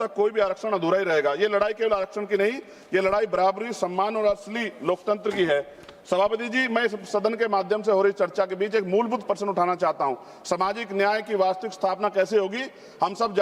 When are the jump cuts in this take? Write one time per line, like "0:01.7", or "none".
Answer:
none